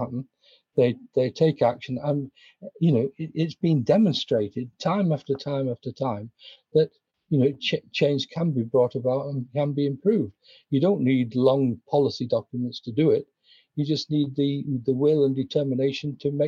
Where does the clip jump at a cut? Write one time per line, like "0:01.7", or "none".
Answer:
none